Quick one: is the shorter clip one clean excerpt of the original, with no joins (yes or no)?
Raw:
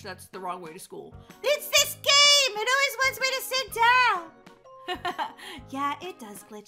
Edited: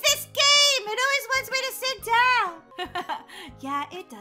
no